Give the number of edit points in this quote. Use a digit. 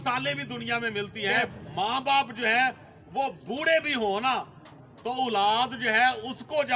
1